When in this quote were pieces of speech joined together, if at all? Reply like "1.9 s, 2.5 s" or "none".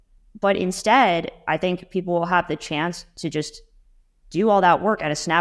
none